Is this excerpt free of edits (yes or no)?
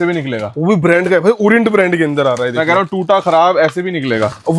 yes